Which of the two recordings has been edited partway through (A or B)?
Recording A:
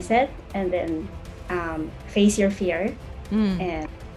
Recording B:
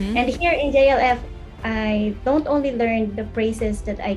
B